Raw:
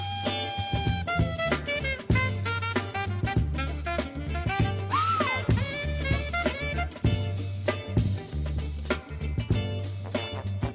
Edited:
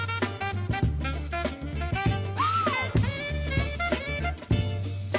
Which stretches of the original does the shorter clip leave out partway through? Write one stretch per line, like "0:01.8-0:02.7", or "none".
none